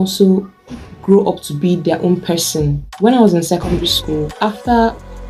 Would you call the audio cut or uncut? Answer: uncut